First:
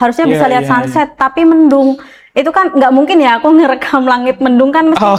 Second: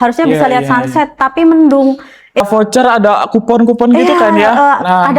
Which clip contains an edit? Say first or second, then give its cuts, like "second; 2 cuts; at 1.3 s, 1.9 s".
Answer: second; 1 cut; at 2.4 s